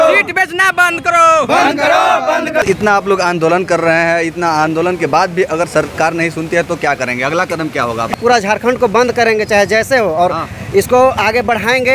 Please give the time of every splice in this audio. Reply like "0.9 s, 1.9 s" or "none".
2.6 s, 8.1 s